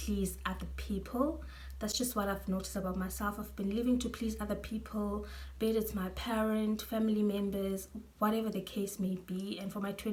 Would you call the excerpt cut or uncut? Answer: uncut